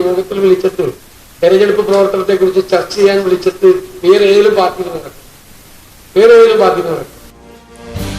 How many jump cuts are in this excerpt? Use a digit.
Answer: 1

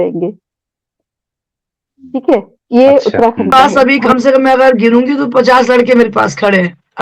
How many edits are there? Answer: 1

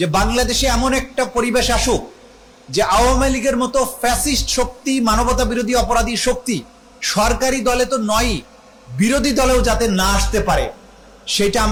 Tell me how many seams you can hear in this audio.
0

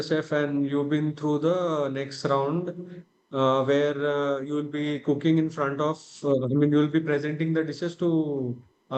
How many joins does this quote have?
0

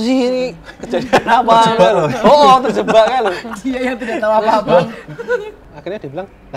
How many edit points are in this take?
1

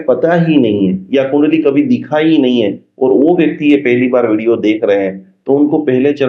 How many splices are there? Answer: 0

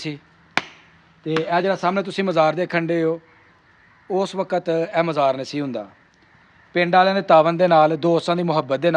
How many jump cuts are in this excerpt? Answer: 0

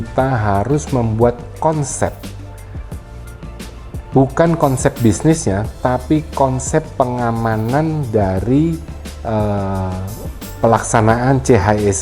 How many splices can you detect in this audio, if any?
0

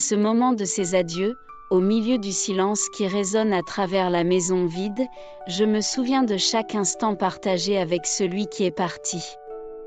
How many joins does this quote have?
0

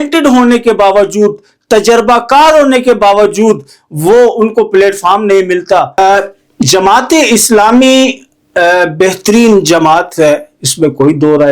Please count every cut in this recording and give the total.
1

